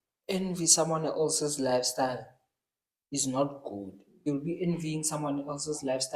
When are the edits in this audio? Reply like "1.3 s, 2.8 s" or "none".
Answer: 4.3 s